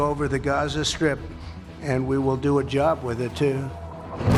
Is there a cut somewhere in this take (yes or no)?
no